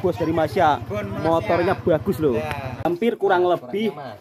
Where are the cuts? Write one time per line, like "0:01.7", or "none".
0:02.7